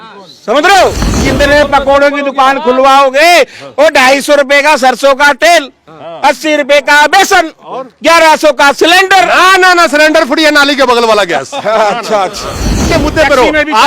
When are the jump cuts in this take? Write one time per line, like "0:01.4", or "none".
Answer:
0:01.2
0:12.9